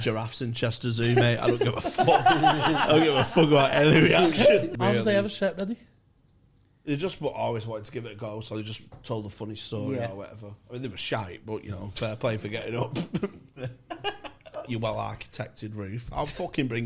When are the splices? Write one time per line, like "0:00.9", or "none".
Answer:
0:04.7
0:14.7